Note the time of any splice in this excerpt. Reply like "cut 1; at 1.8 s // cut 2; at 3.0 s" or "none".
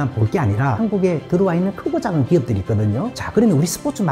cut 1; at 0.8 s // cut 2; at 3.2 s